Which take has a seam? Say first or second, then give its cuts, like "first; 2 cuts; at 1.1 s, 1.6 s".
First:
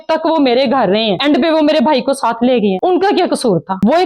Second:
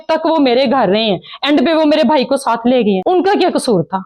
first; 1 cut; at 1.2 s